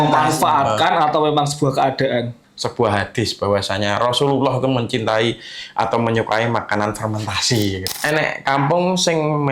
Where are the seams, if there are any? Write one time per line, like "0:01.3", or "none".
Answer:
0:02.4
0:07.8